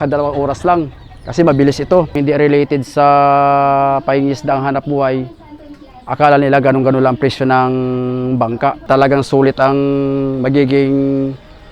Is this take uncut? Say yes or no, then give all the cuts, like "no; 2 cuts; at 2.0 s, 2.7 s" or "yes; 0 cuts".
no; 2 cuts; at 2.1 s, 8.8 s